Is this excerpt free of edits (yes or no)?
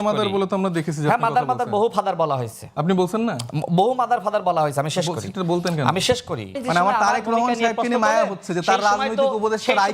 no